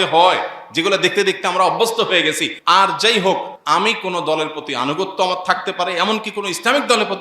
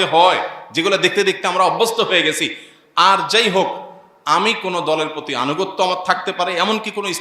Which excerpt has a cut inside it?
first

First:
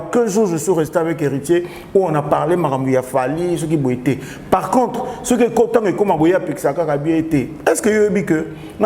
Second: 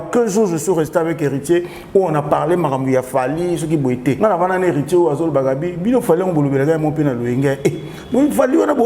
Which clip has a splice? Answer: second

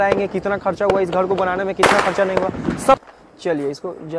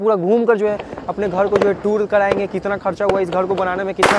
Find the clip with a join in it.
first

